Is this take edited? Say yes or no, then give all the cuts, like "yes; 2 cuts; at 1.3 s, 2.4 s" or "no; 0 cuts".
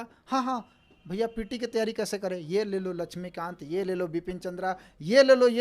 no; 0 cuts